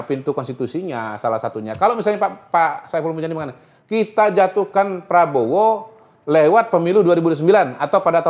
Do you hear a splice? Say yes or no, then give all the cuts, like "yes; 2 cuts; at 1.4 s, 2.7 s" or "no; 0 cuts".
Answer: no; 0 cuts